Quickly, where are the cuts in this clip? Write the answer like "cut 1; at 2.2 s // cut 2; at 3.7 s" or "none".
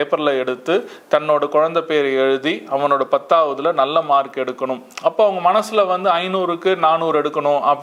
none